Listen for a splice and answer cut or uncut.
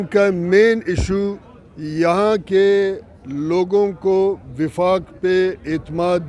uncut